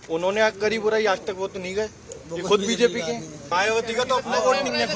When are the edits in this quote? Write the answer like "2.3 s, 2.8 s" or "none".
3.4 s

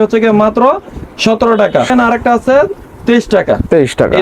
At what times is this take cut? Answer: 1.9 s

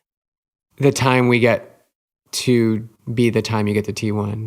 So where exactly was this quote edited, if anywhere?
2.9 s

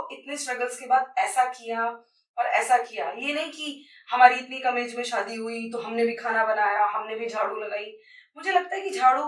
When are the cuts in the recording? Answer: none

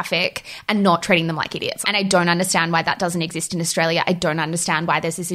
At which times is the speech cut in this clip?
1.7 s

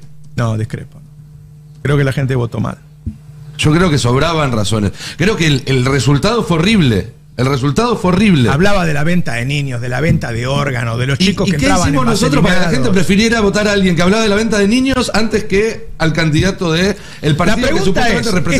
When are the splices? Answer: none

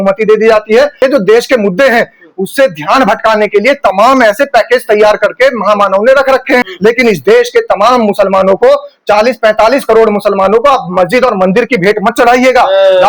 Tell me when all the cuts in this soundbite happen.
1.0 s, 6.7 s

